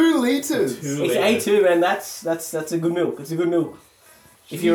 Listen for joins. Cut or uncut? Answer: uncut